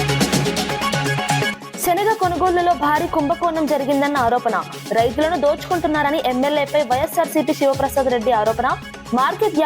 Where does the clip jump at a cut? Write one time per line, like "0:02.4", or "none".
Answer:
0:01.6